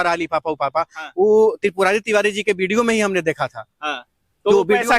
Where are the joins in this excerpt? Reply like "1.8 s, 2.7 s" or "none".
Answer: none